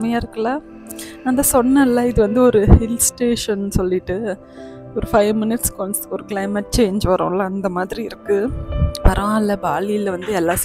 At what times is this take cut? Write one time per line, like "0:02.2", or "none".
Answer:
none